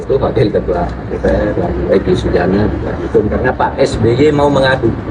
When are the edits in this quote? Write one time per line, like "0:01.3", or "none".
none